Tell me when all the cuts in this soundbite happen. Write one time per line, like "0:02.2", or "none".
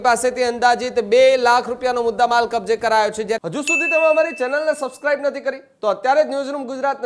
0:03.4